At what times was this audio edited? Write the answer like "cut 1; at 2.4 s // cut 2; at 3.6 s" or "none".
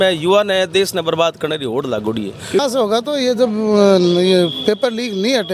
cut 1; at 2.6 s